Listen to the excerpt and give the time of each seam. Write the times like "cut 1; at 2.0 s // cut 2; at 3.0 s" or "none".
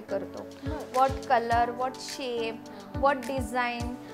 none